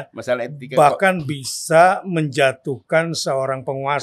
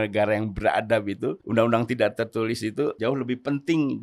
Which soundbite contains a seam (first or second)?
second